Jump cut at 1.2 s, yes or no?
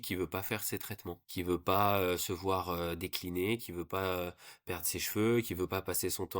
yes